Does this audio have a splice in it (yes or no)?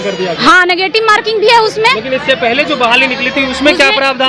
no